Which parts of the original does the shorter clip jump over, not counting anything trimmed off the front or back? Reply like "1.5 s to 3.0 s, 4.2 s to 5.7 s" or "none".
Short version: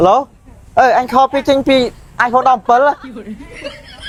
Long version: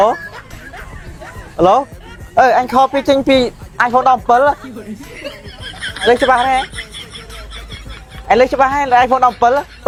none